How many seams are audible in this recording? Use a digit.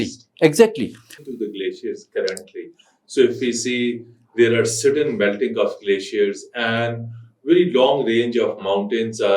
1